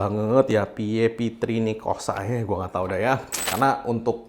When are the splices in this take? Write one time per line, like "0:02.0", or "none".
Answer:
0:03.3